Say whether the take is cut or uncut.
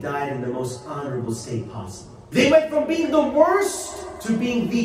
cut